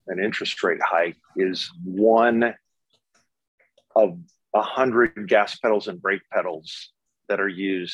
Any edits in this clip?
no; 0 cuts

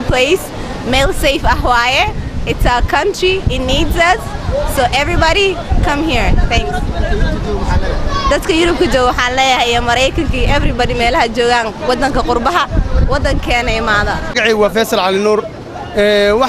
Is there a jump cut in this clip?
yes; 1 cut; at 14.2 s

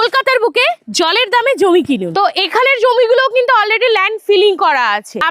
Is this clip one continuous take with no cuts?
yes; 0 cuts

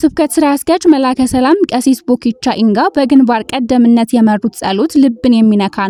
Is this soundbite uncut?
yes; 0 cuts

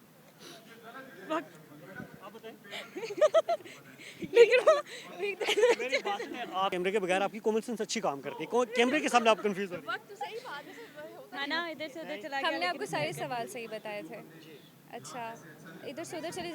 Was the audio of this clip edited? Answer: no; 0 cuts

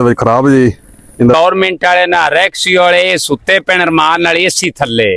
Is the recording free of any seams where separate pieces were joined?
no; 1 cut; at 1.3 s

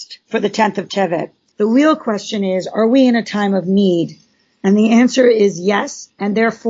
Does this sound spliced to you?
yes; 1 cut; at 1.4 s

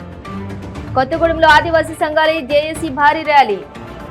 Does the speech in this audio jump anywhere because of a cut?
yes; 1 cut; at 0.9 s

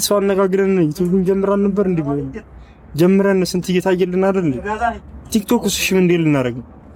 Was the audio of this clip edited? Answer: no; 0 cuts

